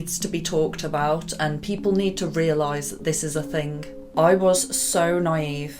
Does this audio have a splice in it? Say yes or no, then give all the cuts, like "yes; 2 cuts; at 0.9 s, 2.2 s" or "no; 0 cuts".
yes; 1 cut; at 3.9 s